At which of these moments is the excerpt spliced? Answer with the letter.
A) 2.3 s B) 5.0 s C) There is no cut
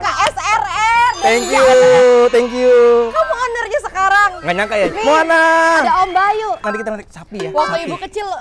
B